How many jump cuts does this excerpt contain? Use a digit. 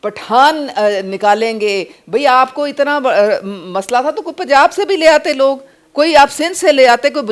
0